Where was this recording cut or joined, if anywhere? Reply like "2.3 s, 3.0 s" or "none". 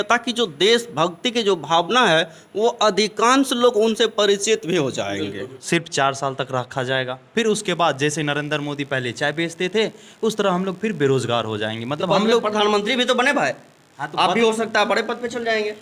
5.6 s